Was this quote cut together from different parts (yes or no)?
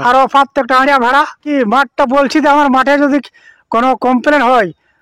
yes